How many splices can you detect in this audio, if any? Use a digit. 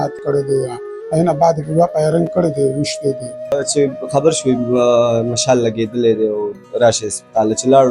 1